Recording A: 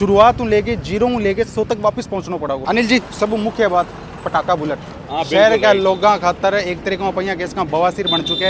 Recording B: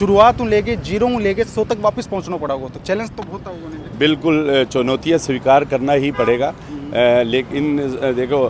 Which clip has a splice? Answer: A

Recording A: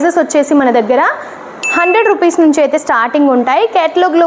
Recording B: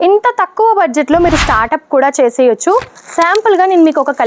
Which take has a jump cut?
B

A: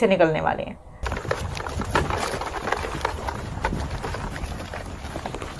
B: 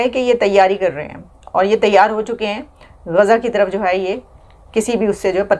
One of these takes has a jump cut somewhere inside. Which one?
A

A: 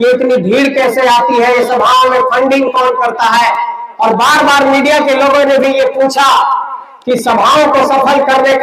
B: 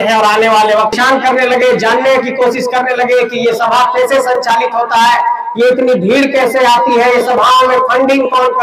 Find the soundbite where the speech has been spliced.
B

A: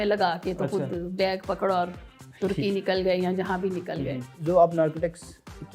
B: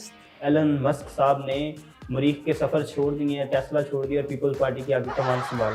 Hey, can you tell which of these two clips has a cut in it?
A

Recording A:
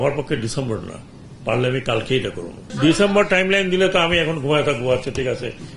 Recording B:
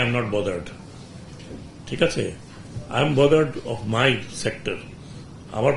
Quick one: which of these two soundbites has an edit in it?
A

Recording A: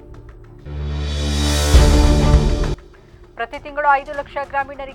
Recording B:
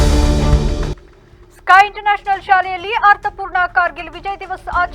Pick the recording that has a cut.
B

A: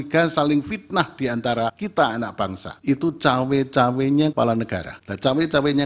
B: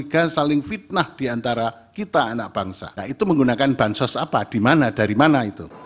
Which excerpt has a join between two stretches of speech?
A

